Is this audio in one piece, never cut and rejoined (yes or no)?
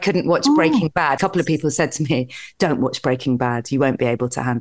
no